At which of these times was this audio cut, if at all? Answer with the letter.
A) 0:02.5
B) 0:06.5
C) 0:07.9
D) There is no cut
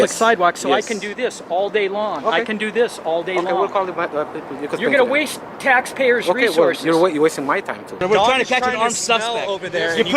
C